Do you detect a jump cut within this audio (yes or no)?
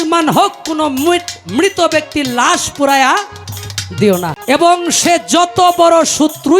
yes